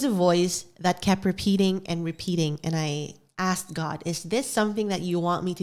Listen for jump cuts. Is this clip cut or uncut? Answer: uncut